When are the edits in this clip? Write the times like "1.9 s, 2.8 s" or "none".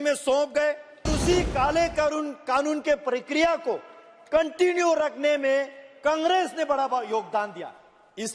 1.2 s